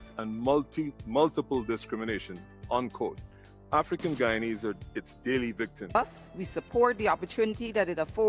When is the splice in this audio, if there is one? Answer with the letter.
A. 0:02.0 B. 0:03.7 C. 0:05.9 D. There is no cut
C